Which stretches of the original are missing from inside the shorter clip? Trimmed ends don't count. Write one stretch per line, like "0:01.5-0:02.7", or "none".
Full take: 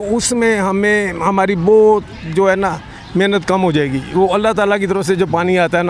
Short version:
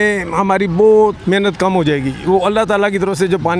0:02.1-0:03.1